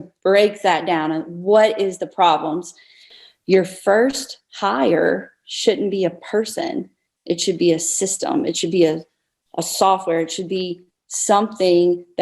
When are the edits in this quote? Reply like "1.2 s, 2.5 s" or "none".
3.1 s